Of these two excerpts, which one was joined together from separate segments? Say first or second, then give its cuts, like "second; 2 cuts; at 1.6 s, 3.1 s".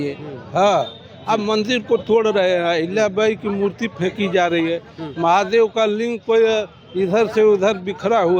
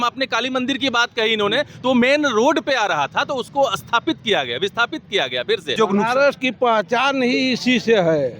second; 1 cut; at 5.7 s